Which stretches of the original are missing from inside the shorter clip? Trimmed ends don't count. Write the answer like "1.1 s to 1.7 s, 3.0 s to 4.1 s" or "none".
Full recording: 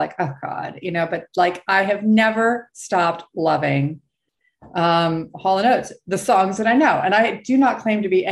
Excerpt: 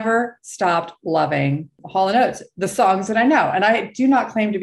4.1 s to 5.3 s